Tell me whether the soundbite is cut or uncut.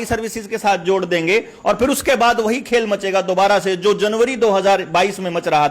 uncut